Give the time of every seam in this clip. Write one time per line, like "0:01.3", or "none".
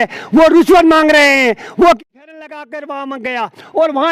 0:02.0